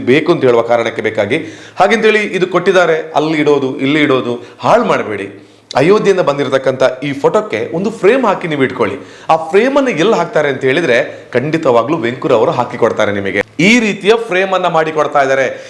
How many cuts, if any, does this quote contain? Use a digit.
1